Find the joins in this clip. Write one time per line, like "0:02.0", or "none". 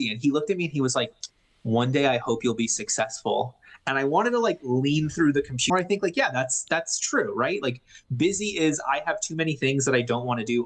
0:05.7

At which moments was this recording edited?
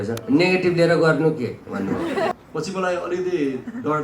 0:02.3

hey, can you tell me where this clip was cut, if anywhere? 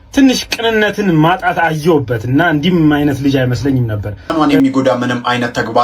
0:04.3

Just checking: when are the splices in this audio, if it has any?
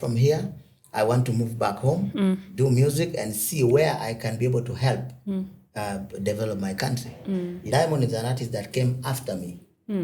0:07.6

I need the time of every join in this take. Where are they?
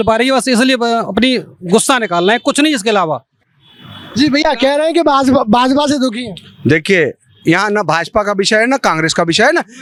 none

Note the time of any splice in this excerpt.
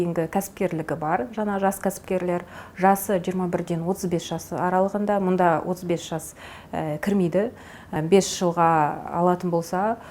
0:08.0

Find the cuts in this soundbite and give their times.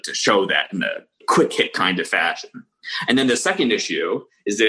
0:01.2

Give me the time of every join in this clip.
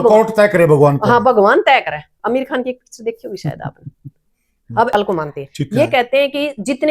0:04.9

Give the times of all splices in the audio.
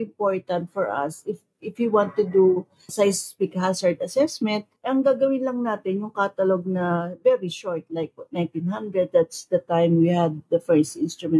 0:02.9
0:04.7

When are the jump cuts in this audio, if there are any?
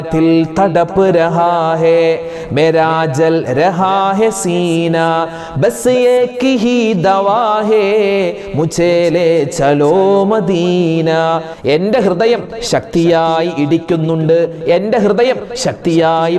none

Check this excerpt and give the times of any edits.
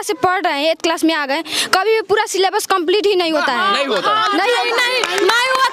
none

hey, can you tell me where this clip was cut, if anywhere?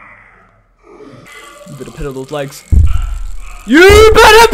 0:01.3

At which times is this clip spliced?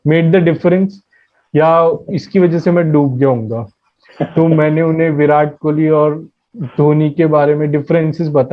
none

